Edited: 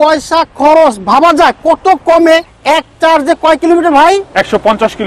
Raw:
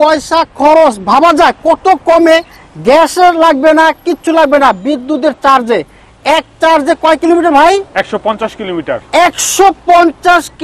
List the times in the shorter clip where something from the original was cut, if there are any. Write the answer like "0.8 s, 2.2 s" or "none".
2.5 s